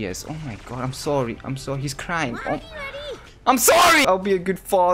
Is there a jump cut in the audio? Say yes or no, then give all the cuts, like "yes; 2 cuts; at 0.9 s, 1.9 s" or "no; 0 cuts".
yes; 1 cut; at 4.0 s